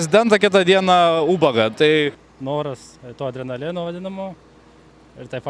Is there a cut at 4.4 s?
no; 1 cut; at 2.1 s

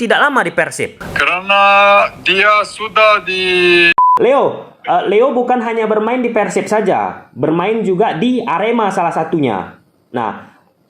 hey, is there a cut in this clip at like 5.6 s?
no; 1 cut; at 4.0 s

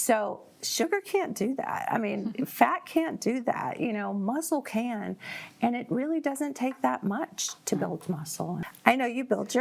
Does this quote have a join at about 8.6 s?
yes; 1 cut; at 8.6 s

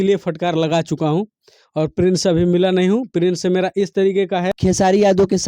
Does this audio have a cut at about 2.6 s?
no; 1 cut; at 4.5 s

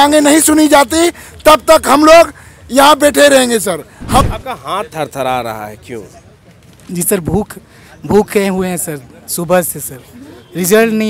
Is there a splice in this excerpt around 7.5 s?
no; 1 cut; at 4.2 s

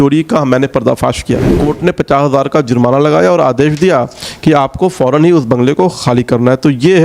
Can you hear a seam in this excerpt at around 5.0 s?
no; 1 cut; at 1.5 s

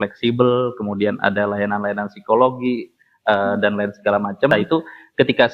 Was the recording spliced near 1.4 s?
no; 1 cut; at 4.5 s

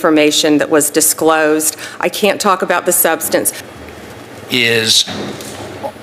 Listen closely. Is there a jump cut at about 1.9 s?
no; 1 cut; at 3.6 s

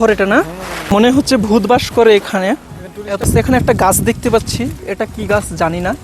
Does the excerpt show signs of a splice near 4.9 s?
no; 2 cuts; at 1.0 s, 3.0 s

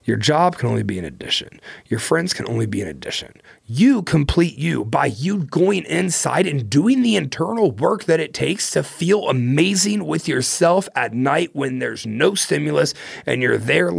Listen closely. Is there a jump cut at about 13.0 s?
no; 0 cuts

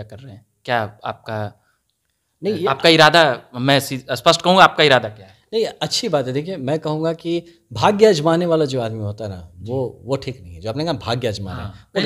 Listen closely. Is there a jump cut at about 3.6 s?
no; 0 cuts

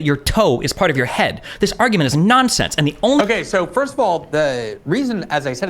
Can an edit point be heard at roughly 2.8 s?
yes; 1 cut; at 2.8 s

